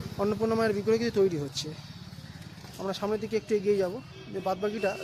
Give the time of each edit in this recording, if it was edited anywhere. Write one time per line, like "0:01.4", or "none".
none